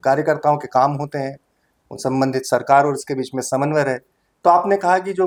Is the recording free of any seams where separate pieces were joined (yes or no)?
yes